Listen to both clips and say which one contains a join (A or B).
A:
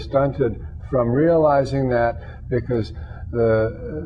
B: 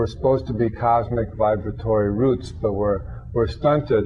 B